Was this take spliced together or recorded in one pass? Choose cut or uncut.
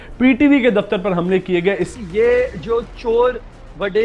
cut